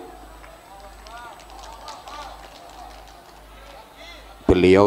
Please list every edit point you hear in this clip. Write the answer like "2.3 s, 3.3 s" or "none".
none